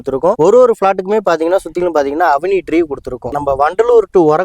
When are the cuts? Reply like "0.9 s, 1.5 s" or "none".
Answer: 3.3 s